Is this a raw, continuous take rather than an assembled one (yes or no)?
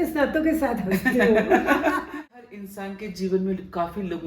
no